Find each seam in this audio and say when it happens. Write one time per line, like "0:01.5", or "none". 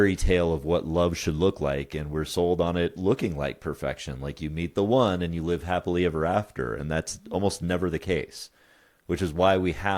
none